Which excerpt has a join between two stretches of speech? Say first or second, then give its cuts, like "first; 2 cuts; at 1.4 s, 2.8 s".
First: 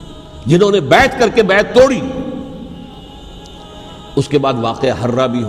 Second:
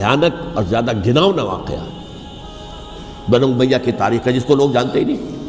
first; 1 cut; at 3.0 s